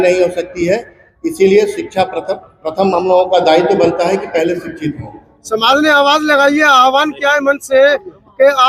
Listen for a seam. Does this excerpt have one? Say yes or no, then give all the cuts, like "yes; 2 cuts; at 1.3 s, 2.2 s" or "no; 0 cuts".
no; 0 cuts